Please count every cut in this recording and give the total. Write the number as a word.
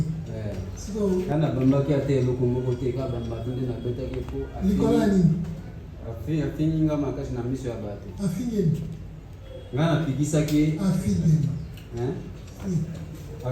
one